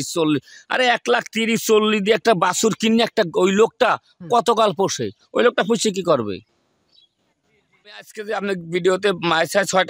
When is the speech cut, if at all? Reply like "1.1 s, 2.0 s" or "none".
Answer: 8.0 s